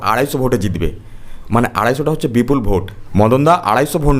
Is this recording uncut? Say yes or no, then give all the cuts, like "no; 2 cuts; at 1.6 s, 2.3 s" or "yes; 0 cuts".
no; 1 cut; at 2.9 s